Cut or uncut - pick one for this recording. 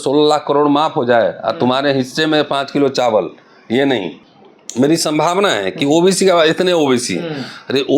cut